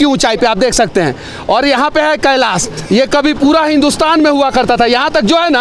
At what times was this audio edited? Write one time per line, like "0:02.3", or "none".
none